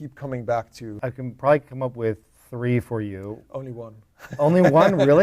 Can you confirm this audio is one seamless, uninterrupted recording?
no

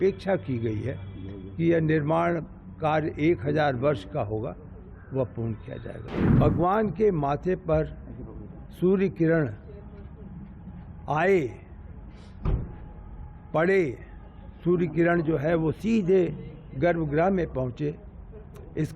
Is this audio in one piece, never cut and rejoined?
no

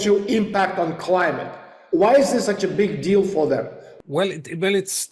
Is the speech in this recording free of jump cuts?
no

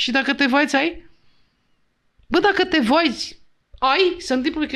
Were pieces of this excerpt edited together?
no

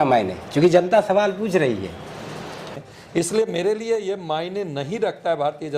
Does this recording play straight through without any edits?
no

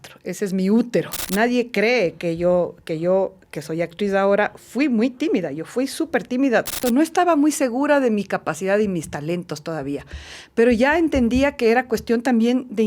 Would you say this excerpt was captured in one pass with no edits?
no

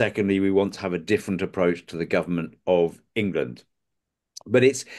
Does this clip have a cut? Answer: no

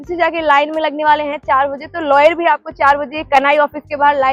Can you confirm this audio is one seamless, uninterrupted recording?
yes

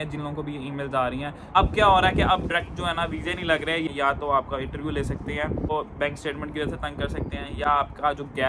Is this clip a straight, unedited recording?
no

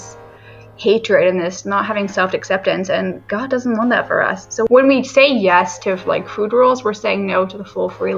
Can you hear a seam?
yes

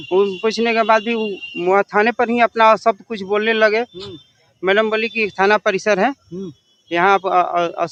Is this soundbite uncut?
yes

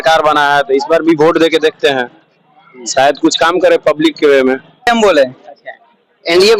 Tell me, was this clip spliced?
yes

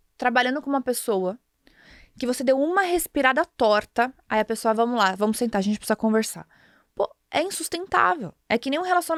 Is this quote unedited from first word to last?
yes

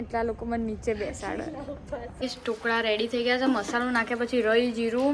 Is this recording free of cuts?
no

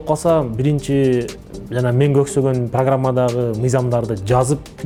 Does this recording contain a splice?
no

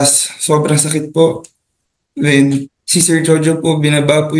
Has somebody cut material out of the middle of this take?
yes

